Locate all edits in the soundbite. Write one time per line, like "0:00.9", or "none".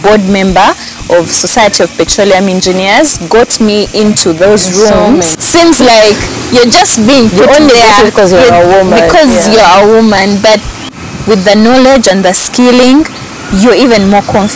0:05.4
0:10.8